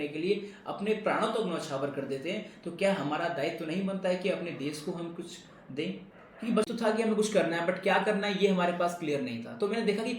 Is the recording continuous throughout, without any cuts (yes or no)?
no